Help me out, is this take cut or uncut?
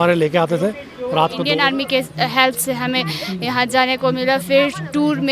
cut